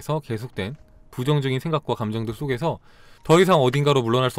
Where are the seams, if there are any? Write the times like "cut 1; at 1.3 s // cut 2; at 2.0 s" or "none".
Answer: none